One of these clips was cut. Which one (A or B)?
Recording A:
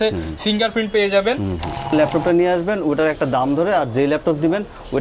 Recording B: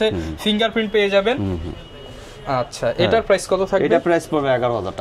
A